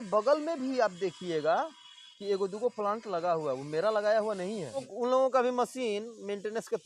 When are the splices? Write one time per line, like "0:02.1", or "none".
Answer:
0:04.9